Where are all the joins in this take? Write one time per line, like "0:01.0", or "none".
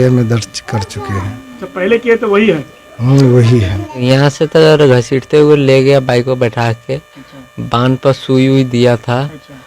0:04.0